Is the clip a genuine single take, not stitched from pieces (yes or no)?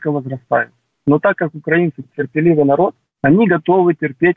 no